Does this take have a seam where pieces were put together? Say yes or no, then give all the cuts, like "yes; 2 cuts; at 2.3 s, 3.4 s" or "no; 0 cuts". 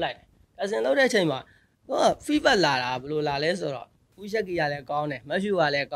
yes; 1 cut; at 4.1 s